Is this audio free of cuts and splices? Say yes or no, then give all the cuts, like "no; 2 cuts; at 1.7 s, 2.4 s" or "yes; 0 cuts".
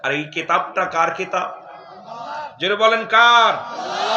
yes; 0 cuts